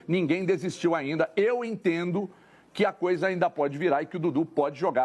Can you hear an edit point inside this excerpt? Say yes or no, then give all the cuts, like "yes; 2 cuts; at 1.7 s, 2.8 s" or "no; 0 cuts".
no; 0 cuts